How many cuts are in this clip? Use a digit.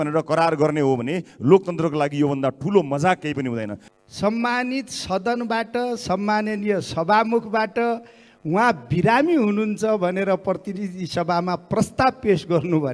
1